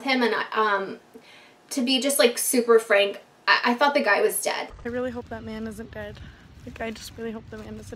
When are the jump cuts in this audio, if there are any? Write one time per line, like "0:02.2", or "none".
0:04.7